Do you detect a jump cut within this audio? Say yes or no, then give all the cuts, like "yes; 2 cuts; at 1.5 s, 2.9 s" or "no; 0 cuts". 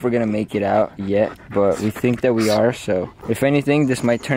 yes; 1 cut; at 3.2 s